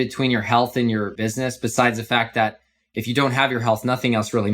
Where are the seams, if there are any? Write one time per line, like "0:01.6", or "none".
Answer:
0:01.2